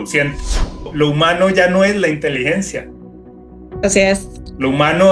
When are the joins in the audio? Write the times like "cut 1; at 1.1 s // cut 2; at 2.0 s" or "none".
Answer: cut 1; at 0.9 s